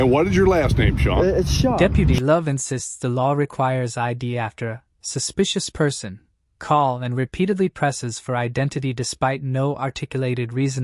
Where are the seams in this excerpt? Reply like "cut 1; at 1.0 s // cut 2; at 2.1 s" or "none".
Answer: none